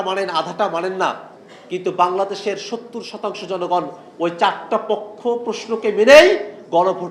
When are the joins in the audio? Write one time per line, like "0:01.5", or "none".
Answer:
none